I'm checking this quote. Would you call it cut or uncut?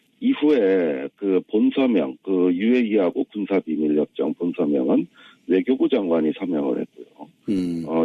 cut